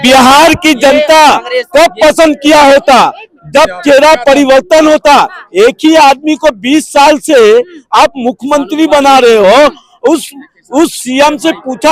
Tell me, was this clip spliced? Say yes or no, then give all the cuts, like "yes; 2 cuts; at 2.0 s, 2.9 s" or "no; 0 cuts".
no; 0 cuts